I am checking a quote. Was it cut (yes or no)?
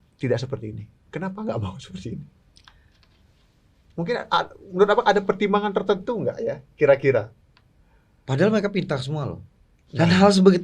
no